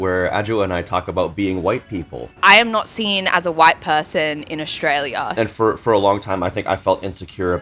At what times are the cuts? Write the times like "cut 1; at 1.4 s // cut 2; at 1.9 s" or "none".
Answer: cut 1; at 2.2 s // cut 2; at 5.3 s